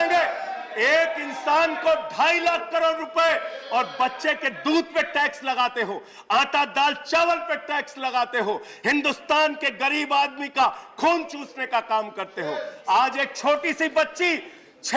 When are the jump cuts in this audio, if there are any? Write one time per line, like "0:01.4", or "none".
0:12.7